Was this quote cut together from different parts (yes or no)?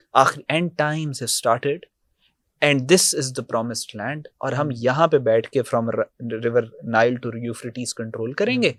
no